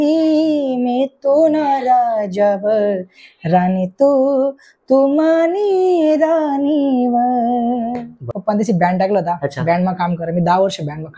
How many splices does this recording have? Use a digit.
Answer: 1